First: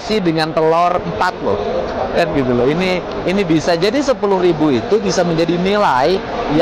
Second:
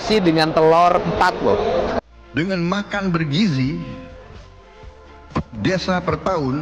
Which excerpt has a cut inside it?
second; 1 cut; at 1.9 s

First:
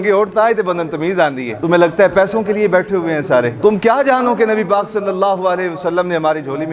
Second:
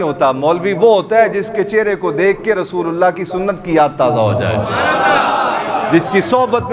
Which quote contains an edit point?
first; 2 cuts; at 1.5 s, 3.6 s

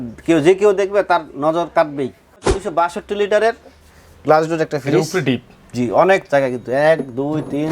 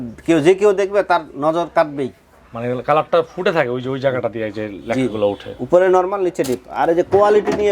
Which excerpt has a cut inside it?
first; 1 cut; at 2.6 s

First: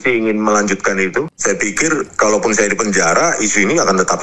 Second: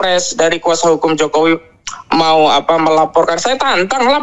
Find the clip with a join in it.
first; 1 cut; at 1.3 s

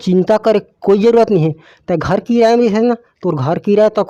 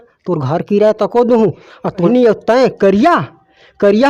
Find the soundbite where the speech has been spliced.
second; 1 cut; at 2.1 s

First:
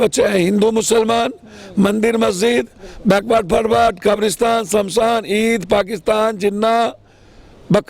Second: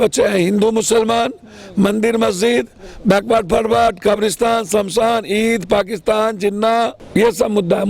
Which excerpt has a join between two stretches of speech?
second; 1 cut; at 7.0 s

